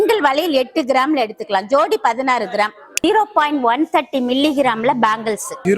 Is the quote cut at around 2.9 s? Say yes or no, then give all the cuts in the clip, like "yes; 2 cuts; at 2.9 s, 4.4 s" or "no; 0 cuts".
yes; 1 cut; at 2.9 s